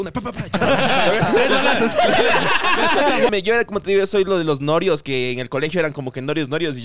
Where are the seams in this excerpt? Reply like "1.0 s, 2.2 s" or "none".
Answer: 3.3 s